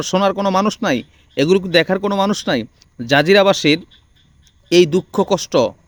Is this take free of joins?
yes; 0 cuts

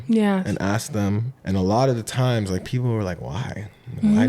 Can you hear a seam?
yes; 1 cut; at 1.3 s

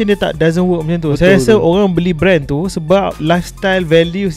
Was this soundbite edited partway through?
no; 0 cuts

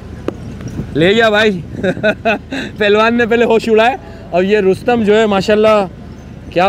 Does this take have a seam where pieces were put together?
no; 0 cuts

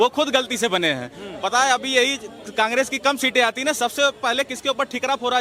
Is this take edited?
no; 0 cuts

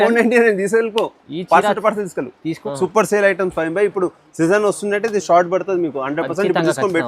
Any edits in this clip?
yes; 1 cut; at 2.6 s

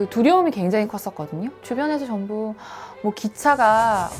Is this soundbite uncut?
yes; 0 cuts

